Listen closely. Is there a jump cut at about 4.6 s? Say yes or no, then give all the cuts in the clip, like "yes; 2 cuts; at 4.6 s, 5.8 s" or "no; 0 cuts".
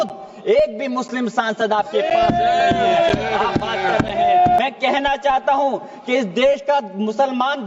yes; 1 cut; at 4.6 s